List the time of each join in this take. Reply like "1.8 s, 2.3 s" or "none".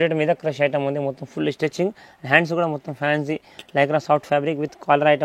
none

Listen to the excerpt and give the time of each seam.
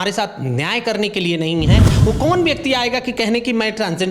1.9 s

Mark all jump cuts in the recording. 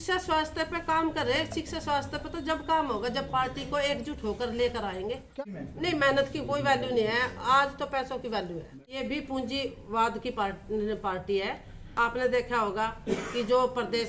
5.5 s, 8.8 s, 12.1 s

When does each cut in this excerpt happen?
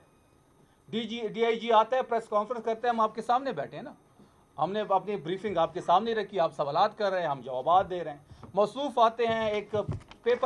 none

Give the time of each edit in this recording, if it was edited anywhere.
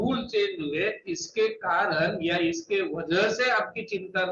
none

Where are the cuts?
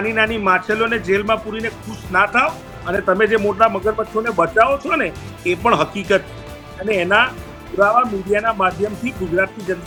none

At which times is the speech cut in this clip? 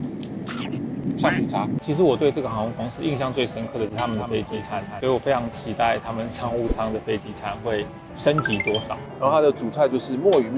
1.8 s, 9.0 s

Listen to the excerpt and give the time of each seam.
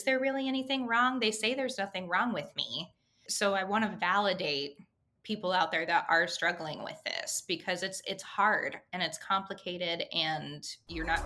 none

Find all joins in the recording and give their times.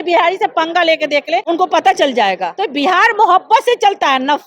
1.4 s, 2.5 s

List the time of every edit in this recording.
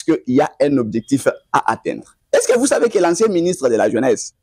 2.1 s

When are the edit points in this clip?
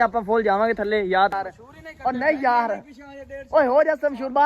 1.3 s

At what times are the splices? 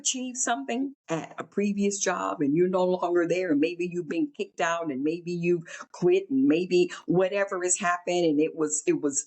1.0 s

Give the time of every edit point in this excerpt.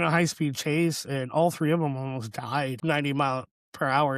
2.8 s

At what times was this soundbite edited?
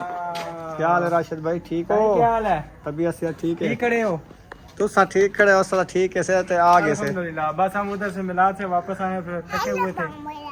none

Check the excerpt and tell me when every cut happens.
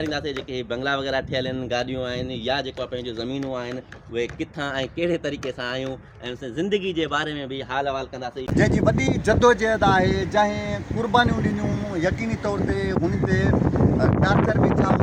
none

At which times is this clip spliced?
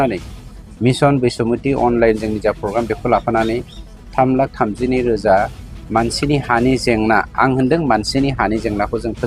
none

